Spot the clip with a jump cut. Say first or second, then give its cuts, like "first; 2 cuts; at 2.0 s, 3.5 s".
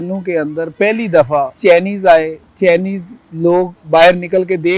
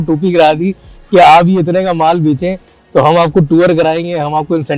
first; 1 cut; at 1.5 s